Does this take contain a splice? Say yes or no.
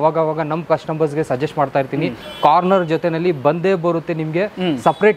no